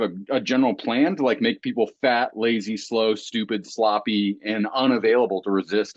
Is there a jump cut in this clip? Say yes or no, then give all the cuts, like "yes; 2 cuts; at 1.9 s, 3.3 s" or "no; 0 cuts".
no; 0 cuts